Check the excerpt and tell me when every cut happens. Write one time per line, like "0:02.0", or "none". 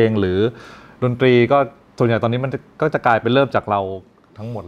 none